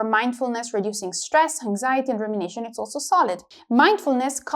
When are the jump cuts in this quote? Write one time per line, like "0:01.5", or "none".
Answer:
0:03.4